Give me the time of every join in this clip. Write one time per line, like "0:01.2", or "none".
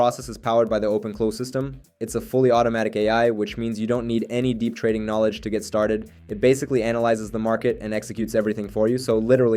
none